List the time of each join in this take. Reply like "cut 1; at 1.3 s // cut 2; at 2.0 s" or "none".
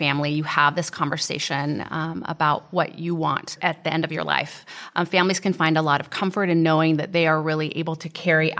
none